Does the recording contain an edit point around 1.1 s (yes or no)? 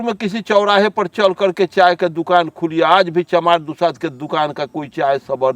no